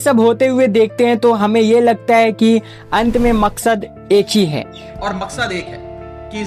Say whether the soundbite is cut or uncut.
cut